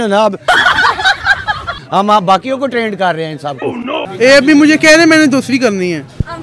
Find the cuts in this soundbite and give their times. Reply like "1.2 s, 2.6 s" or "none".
1.7 s, 4.1 s